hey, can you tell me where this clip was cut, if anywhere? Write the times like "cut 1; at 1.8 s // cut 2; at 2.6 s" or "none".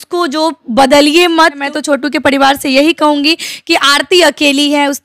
cut 1; at 1.6 s

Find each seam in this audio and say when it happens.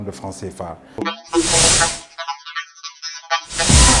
cut 1; at 0.9 s

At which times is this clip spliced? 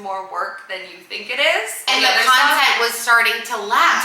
cut 1; at 1.9 s

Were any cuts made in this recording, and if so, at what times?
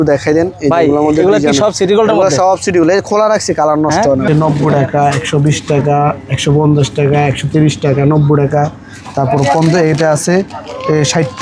cut 1; at 4.2 s

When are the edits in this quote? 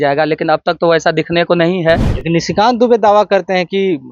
cut 1; at 2.1 s

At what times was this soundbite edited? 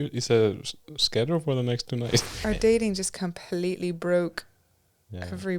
cut 1; at 2.3 s

